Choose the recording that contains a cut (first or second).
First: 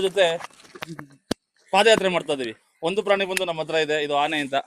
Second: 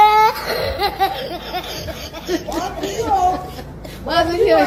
first